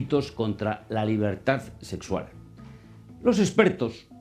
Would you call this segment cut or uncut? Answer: cut